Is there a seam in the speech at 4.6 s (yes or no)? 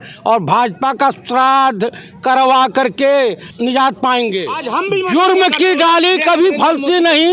yes